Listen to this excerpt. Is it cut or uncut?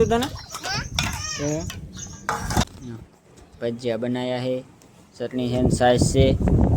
cut